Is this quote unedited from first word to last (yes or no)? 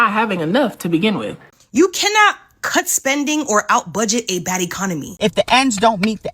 no